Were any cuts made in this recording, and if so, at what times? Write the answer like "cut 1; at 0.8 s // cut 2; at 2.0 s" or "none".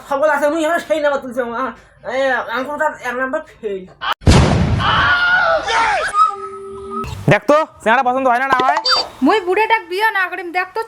cut 1; at 4.1 s // cut 2; at 7.0 s